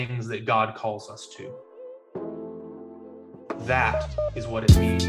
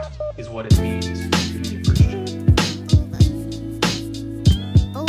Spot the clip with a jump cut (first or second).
first